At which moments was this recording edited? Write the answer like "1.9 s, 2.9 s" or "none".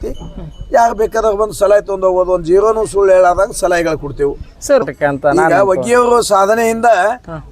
4.8 s